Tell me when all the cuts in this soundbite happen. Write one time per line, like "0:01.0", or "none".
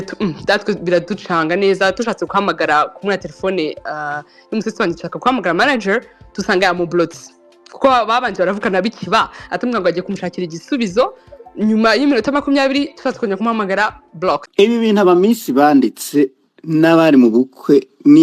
0:14.5